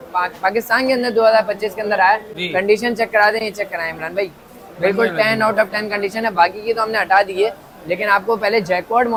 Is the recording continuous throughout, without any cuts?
yes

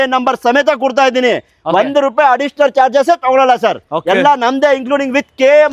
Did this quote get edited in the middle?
no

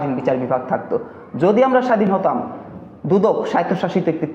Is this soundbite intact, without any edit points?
yes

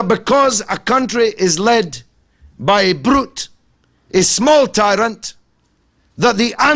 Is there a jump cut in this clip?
no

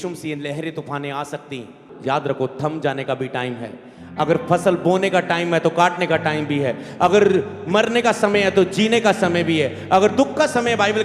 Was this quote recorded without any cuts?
no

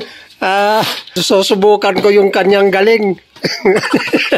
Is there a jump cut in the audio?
yes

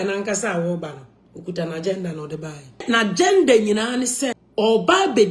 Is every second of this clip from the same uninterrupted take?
no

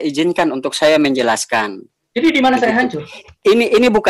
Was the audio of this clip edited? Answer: no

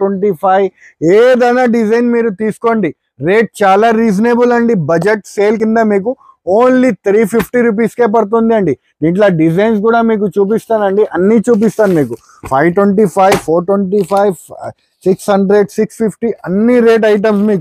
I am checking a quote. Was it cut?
no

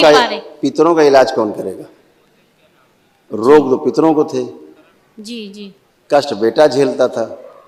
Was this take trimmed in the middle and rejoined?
no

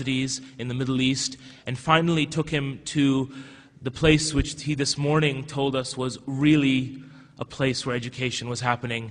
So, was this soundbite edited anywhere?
yes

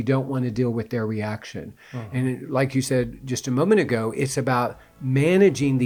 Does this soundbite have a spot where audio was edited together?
no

